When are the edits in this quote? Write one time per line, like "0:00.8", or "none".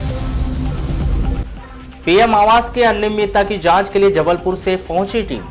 0:01.2